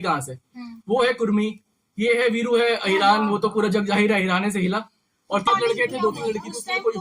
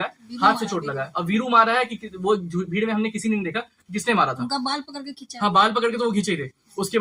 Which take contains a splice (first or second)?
first